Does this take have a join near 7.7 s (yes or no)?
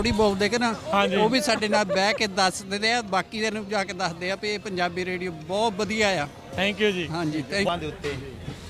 yes